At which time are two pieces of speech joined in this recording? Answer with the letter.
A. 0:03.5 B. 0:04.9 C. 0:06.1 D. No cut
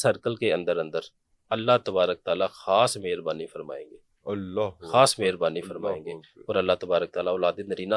D